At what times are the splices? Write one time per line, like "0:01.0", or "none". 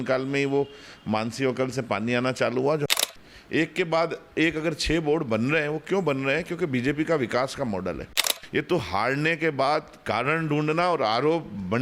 0:02.9
0:08.3